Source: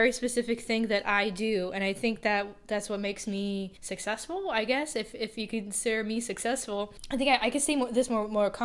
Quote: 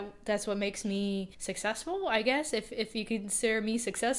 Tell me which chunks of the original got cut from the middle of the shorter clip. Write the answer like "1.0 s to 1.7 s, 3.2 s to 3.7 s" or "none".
none